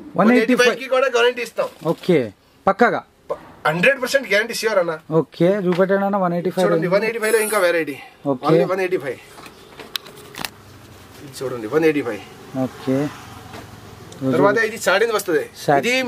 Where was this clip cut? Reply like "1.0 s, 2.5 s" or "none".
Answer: none